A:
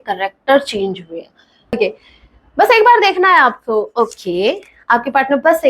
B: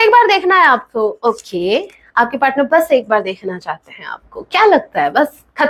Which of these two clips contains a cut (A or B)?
A